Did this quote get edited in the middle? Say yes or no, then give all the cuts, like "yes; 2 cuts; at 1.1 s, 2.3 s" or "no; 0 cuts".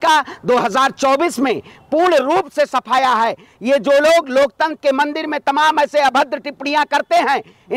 no; 0 cuts